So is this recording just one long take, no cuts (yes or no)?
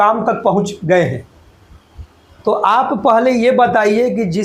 yes